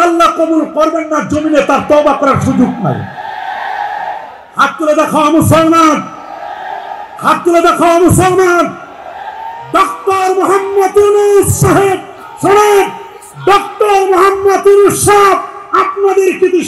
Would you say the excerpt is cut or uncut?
uncut